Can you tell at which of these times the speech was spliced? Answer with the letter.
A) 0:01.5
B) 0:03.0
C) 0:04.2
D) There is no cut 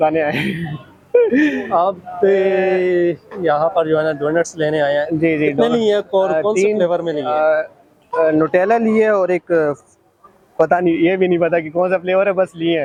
D